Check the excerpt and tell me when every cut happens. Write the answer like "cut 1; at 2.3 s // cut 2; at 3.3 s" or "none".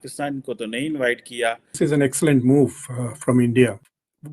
cut 1; at 1.8 s

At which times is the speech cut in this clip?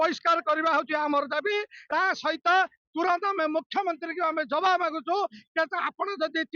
cut 1; at 1.7 s

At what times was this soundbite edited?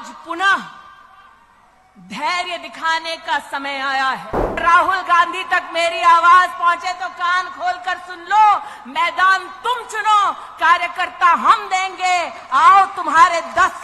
cut 1; at 4.6 s

